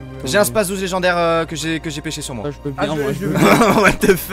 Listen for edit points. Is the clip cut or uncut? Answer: uncut